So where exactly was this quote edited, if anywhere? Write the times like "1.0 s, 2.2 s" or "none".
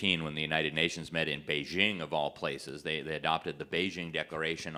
none